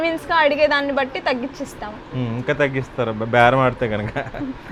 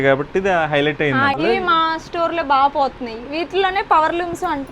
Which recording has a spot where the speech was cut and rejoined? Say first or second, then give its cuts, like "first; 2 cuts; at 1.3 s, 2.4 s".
second; 1 cut; at 1.4 s